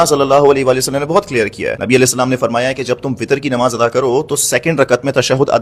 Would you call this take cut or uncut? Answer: uncut